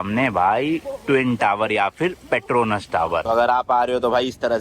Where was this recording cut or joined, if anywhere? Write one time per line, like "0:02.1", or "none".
0:03.2